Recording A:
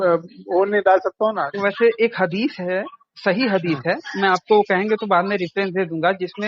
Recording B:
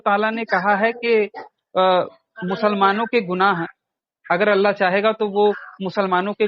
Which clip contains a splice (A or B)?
A